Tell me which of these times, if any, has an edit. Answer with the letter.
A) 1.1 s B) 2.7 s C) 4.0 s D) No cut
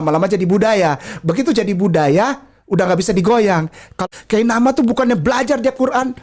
C